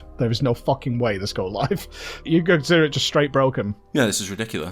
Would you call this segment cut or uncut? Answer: cut